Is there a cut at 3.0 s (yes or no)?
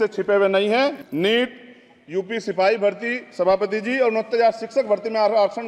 no